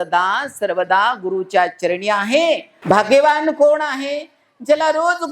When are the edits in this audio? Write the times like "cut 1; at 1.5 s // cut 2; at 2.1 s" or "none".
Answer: cut 1; at 2.7 s